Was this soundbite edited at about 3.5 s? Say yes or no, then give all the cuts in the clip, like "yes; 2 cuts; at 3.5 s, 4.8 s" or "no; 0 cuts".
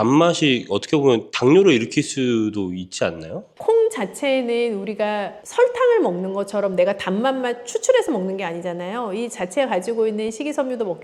yes; 1 cut; at 3.5 s